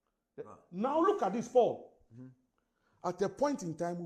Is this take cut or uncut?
uncut